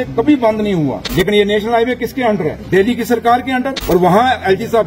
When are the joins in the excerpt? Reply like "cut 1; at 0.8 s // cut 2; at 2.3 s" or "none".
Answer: cut 1; at 1.0 s // cut 2; at 2.6 s // cut 3; at 3.8 s